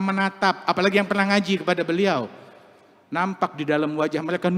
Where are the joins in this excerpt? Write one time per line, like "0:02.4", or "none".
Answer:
none